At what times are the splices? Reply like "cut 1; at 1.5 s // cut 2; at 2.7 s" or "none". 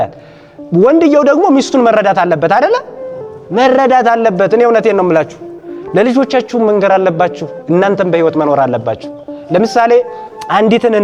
none